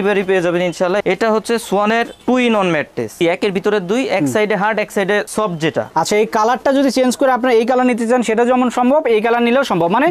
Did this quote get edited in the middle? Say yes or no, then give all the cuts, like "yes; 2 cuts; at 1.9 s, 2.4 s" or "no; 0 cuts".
yes; 3 cuts; at 1.0 s, 3.2 s, 5.9 s